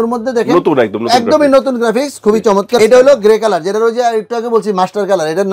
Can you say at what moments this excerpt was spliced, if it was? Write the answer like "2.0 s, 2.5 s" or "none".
2.8 s